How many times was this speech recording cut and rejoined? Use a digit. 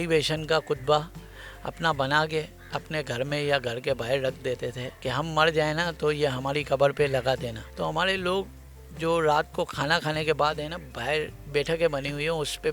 0